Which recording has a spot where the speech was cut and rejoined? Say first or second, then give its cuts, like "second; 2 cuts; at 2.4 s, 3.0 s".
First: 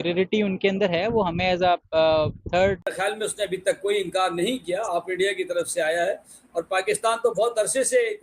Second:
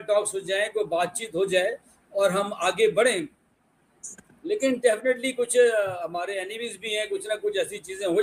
first; 1 cut; at 2.8 s